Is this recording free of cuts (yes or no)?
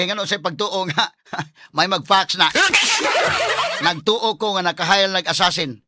no